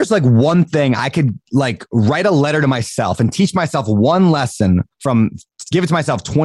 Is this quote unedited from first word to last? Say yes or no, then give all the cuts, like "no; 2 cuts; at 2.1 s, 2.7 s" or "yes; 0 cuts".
yes; 0 cuts